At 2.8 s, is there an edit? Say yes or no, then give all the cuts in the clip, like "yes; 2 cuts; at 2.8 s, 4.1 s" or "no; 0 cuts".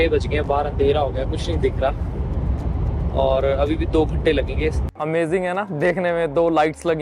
no; 1 cut; at 4.9 s